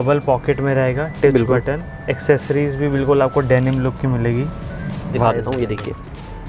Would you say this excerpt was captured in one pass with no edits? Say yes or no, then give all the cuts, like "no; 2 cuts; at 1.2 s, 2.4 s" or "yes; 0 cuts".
no; 1 cut; at 5.2 s